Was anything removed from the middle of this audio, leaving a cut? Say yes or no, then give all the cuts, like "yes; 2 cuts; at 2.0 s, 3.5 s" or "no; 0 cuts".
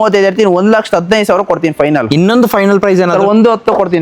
no; 0 cuts